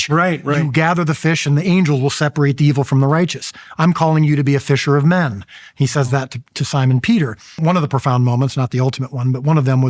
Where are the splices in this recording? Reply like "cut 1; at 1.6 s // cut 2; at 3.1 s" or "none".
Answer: cut 1; at 7.6 s